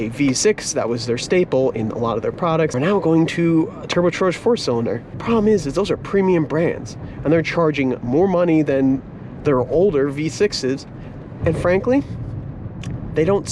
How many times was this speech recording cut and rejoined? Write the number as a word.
two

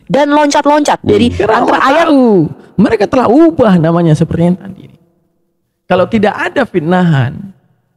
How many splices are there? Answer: one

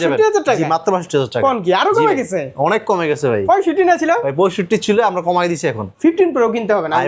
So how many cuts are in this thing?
one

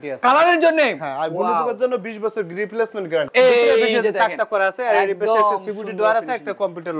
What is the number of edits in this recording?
one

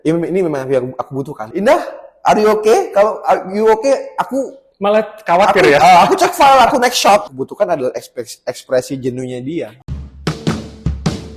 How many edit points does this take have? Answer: three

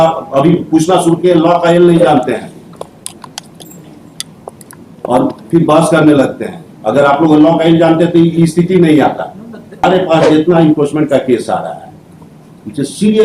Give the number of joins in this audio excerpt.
one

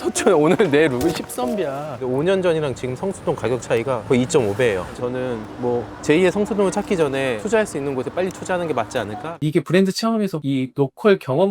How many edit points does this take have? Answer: three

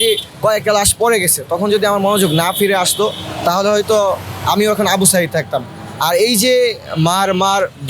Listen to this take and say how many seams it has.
zero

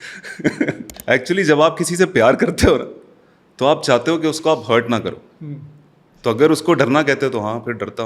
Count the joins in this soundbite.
one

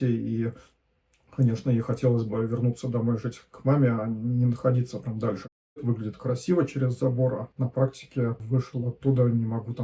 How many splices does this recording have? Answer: three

